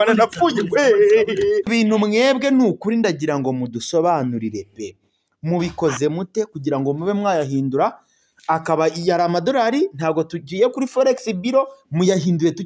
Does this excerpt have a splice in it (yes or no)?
yes